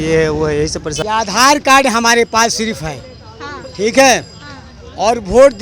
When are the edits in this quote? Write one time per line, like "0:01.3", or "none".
0:00.9